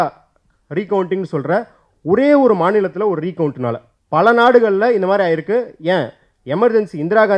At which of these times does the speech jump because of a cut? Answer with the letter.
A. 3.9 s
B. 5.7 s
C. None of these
A